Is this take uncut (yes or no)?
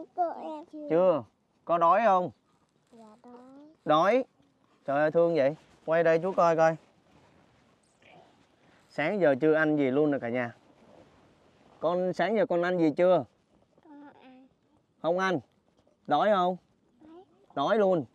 yes